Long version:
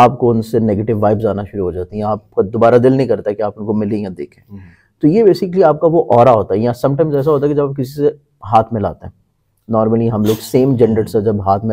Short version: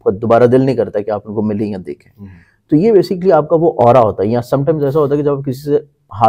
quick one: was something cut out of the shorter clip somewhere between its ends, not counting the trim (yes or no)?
no